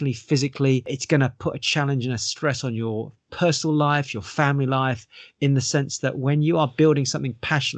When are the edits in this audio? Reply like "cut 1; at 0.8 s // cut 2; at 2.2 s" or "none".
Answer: cut 1; at 0.9 s